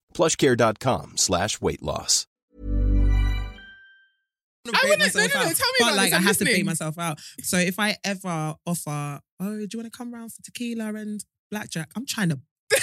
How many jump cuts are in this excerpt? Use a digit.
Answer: 1